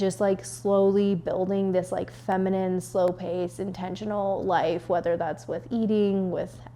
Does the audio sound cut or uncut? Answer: uncut